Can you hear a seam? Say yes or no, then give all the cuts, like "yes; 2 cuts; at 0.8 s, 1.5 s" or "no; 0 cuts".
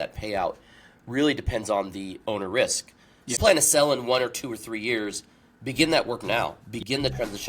yes; 1 cut; at 3.2 s